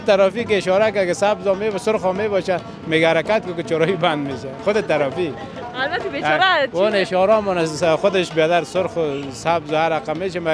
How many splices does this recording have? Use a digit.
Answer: 0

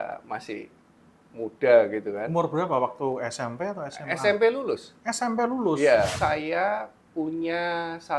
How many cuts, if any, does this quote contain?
1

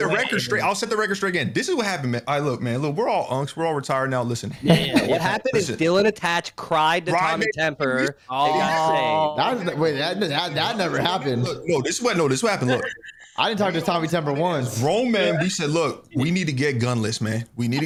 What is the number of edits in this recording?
0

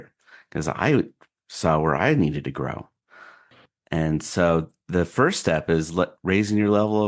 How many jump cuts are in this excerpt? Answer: 0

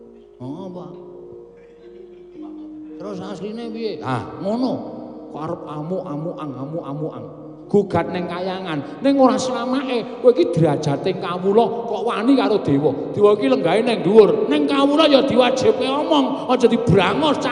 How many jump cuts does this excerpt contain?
1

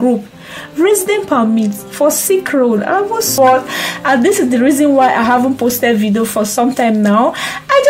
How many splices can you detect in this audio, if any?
1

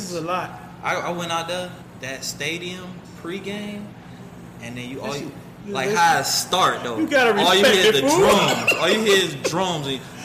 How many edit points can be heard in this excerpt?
1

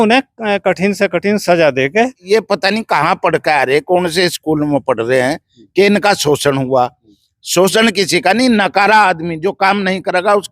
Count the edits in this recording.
1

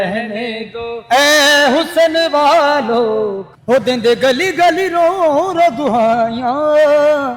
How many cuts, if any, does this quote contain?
1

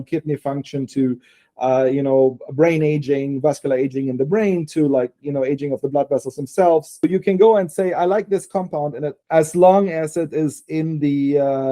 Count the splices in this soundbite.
2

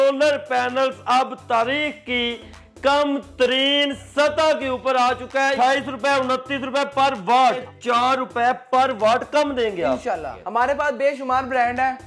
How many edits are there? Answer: 3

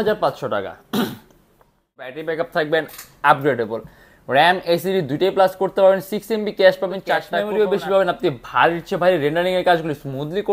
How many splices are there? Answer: 2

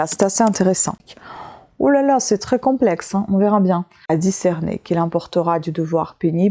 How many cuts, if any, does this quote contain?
2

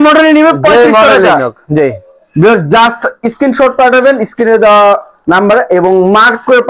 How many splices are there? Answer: 0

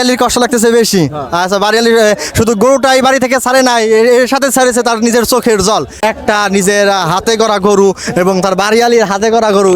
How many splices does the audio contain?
1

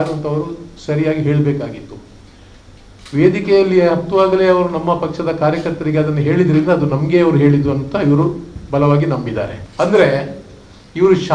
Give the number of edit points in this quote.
1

